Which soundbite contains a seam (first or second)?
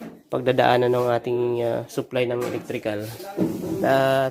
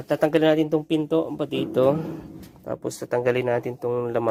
first